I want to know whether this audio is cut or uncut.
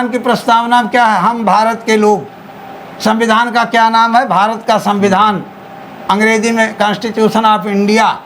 uncut